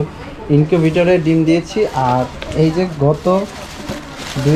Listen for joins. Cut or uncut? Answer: uncut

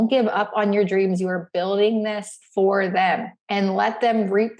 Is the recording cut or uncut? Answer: cut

